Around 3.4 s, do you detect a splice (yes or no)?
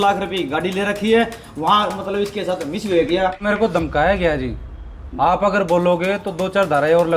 yes